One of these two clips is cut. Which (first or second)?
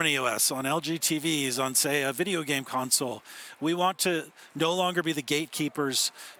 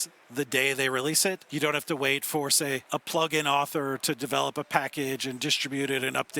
second